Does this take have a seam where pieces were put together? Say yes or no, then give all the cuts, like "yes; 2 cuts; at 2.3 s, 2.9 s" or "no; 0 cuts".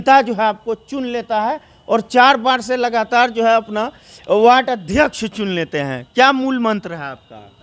no; 0 cuts